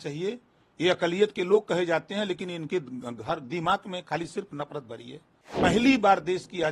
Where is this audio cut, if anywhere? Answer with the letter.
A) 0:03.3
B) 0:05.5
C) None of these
B